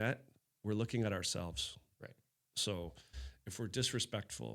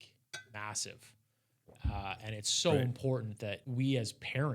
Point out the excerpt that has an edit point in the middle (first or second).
second